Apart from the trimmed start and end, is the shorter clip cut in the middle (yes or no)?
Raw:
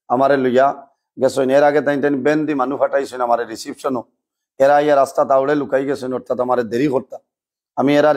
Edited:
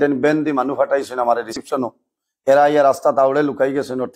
yes